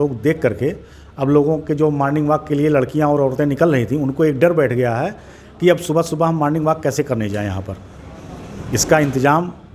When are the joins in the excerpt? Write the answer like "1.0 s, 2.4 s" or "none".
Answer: none